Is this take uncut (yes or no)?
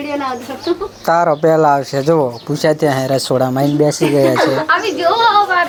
yes